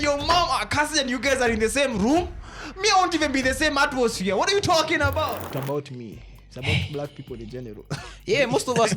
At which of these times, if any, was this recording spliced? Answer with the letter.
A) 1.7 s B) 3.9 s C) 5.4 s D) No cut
C